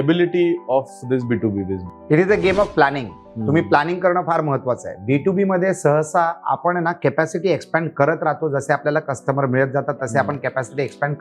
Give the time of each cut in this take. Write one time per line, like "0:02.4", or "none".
0:01.9